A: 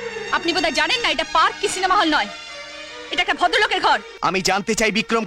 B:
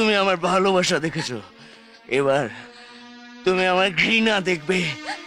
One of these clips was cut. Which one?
A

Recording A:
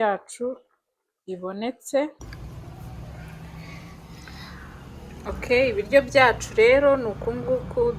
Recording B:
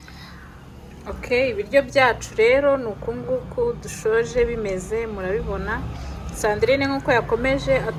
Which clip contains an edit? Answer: A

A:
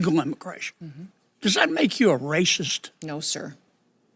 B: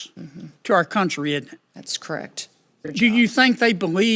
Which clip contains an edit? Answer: B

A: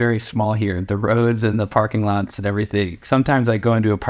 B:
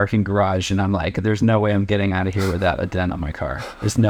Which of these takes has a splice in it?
A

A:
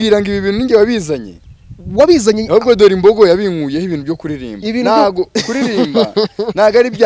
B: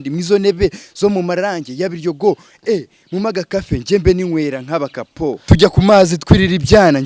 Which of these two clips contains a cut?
B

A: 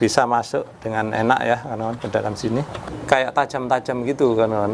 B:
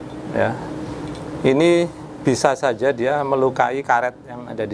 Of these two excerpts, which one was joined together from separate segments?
A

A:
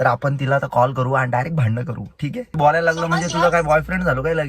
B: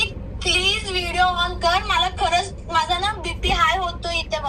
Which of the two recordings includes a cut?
A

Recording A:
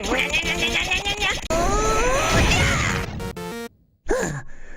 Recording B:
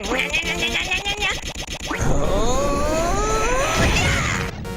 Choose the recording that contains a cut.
A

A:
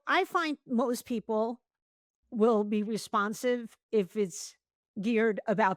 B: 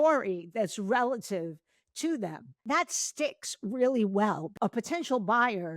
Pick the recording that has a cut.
B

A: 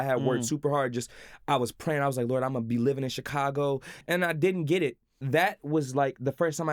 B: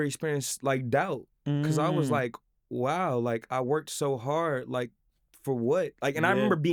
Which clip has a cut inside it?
A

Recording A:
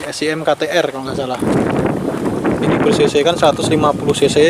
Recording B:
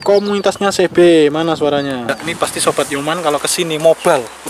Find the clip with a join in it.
B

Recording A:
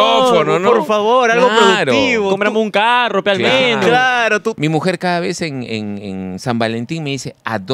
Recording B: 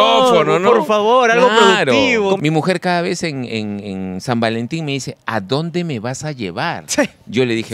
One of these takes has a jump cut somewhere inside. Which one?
B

